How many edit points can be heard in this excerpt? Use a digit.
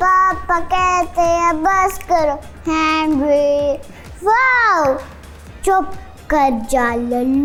0